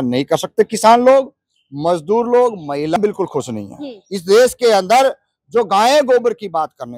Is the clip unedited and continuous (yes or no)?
no